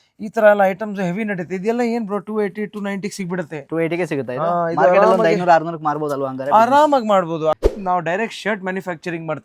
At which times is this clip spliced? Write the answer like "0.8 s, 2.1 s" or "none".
7.5 s